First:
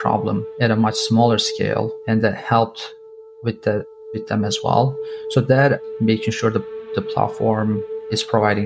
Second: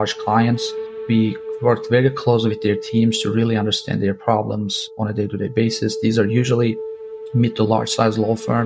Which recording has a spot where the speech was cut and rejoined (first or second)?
first